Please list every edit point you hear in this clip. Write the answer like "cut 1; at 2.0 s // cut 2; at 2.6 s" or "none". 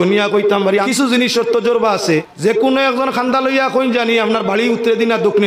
cut 1; at 0.9 s // cut 2; at 2.3 s